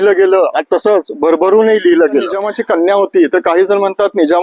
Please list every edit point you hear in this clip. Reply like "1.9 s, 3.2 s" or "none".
2.5 s